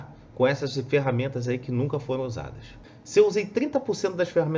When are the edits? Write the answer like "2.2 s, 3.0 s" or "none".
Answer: 2.9 s